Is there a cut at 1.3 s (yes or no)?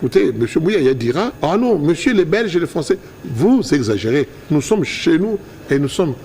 yes